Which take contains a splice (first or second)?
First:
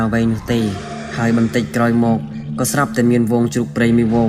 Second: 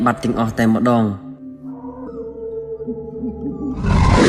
second